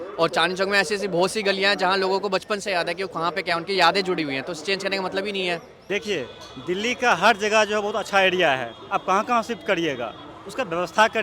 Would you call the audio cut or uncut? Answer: cut